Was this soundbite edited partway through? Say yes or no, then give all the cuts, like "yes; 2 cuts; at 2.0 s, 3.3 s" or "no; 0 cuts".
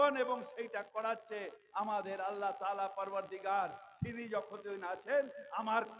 no; 0 cuts